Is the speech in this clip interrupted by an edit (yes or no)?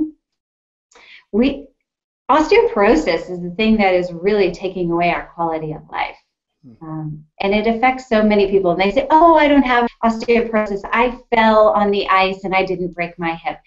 no